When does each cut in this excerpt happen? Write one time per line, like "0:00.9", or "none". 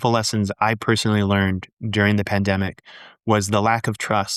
none